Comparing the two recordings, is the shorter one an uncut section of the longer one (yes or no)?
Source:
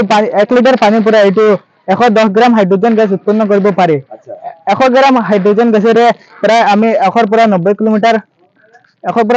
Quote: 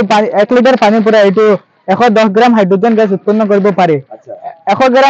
yes